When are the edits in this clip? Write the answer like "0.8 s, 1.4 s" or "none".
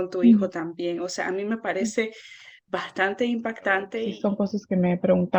4.0 s